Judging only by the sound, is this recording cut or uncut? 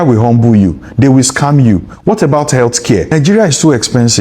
cut